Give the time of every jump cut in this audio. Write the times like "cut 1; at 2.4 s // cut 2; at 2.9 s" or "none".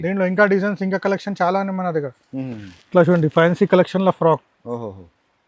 none